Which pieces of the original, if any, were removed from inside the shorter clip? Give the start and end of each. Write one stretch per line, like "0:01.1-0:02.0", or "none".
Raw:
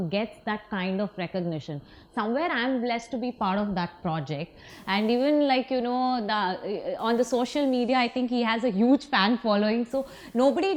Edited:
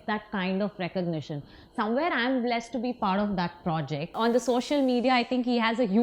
0:04.5-0:07.0